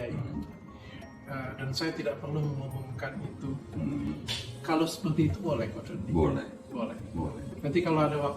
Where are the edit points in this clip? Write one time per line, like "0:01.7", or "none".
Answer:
0:04.1